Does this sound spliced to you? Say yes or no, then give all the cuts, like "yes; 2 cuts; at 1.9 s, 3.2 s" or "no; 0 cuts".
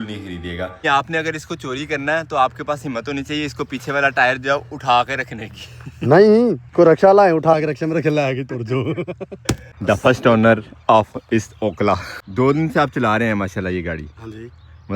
yes; 3 cuts; at 0.8 s, 9.7 s, 12.2 s